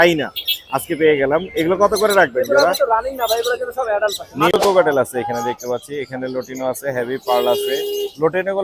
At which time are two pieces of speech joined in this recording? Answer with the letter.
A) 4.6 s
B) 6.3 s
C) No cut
A